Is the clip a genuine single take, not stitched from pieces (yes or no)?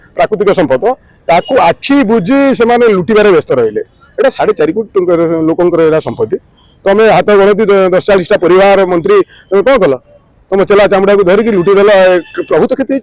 yes